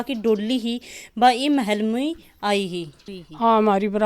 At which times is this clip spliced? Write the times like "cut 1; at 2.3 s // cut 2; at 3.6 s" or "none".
cut 1; at 3.0 s